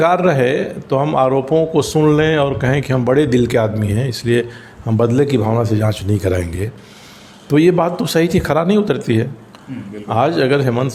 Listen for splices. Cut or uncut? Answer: uncut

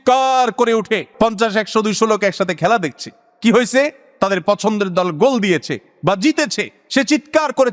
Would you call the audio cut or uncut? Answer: cut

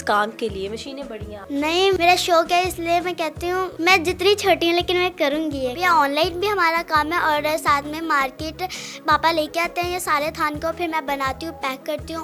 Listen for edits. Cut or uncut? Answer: cut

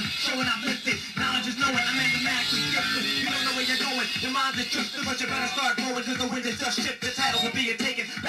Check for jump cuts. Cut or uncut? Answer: uncut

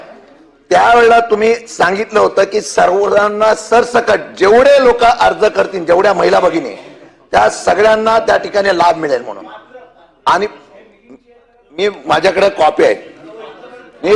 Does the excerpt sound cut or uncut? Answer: uncut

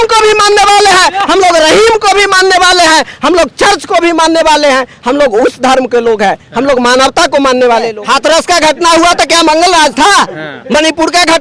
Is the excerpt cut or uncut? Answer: cut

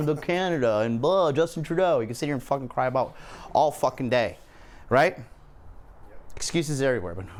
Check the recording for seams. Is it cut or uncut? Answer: uncut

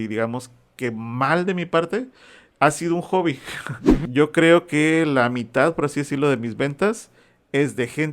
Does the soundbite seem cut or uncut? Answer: cut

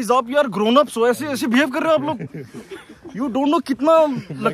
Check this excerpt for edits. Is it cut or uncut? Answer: uncut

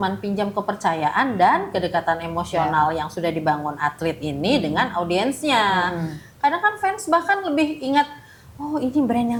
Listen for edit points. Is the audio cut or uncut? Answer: uncut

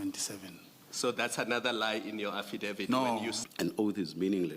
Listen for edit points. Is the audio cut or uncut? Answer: cut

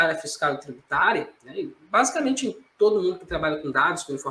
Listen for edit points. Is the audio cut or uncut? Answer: uncut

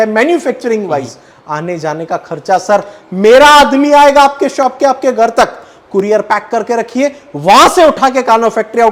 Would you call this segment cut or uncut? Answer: uncut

